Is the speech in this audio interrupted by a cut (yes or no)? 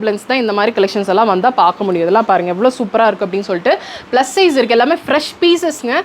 no